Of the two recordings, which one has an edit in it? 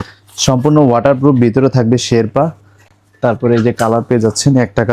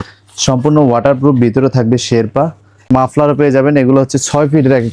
second; 1 cut; at 2.7 s

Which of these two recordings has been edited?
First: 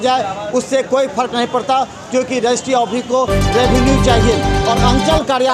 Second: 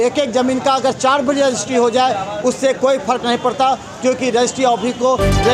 first; 1 cut; at 4.5 s

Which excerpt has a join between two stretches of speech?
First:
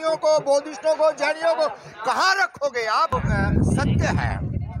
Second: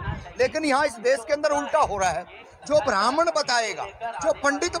first; 1 cut; at 3.1 s

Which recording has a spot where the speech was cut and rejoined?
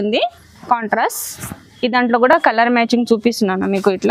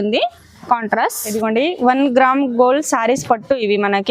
second; 1 cut; at 1.3 s

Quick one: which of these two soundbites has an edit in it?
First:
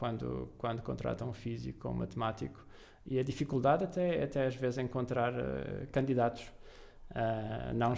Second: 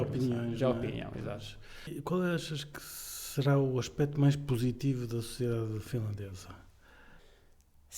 second; 2 cuts; at 1.9 s, 7.2 s

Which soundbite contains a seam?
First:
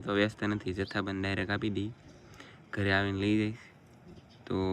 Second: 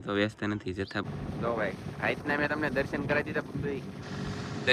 second; 1 cut; at 1.1 s

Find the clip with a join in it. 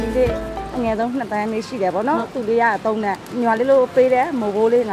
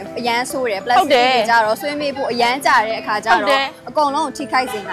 first; 1 cut; at 3.3 s

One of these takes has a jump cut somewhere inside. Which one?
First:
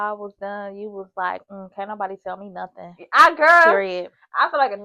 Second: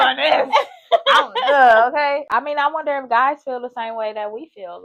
second; 1 cut; at 2.3 s

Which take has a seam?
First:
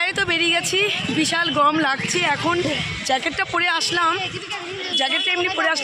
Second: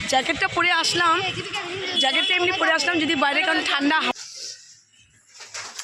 second; 1 cut; at 4.1 s

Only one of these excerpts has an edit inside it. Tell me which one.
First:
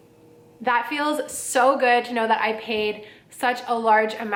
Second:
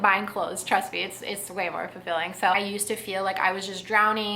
second; 1 cut; at 2.6 s

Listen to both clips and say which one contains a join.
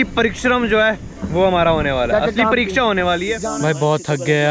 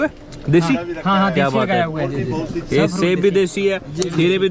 first; 1 cut; at 3.4 s

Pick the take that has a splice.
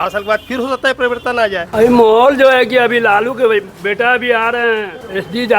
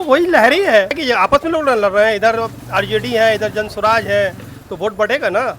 first; 1 cut; at 1.7 s

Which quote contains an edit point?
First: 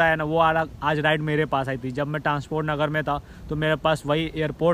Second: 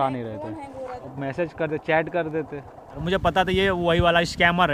second; 2 cuts; at 1.0 s, 3.0 s

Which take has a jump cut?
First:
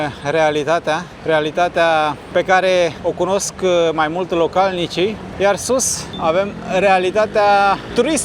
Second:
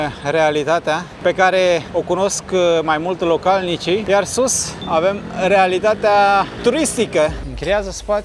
second; 3 cuts; at 1.1 s, 4.0 s, 7.4 s

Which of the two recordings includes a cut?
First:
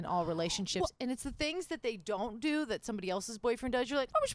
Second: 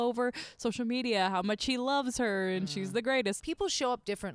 second; 1 cut; at 3.4 s

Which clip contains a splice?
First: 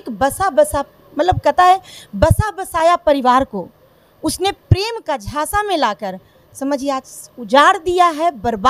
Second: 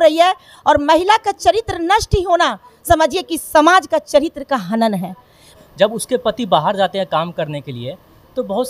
second; 1 cut; at 5.5 s

